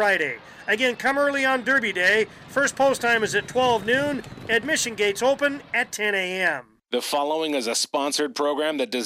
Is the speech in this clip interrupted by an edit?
yes; 1 cut; at 6.8 s

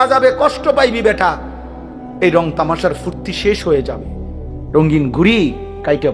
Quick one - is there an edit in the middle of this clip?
no; 0 cuts

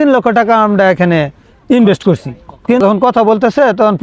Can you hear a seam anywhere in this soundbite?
yes; 1 cut; at 2.8 s

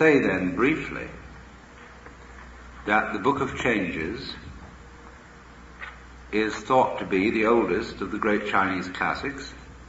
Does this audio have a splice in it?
no; 0 cuts

